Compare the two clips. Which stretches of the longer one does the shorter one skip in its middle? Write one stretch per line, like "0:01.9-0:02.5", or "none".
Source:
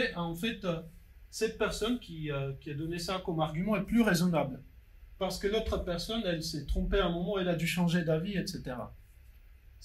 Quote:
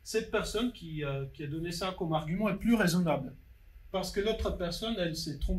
none